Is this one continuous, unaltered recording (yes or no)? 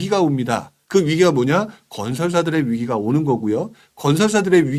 yes